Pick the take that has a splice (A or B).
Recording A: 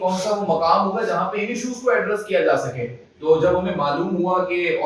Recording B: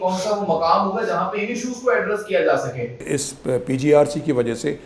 B